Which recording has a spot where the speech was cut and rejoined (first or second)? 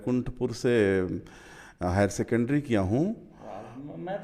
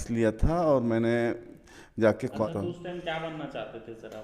second